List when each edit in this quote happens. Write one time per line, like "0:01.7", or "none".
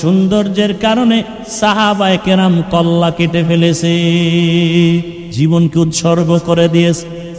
0:05.2